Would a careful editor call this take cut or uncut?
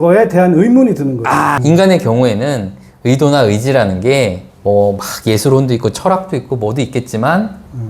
cut